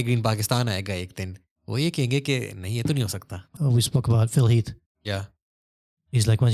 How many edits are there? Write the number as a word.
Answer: one